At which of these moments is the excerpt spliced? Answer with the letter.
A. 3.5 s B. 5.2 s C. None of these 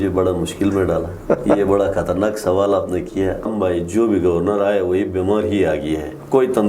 A